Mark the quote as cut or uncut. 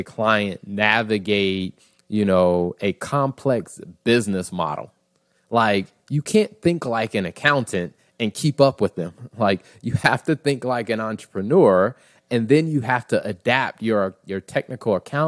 uncut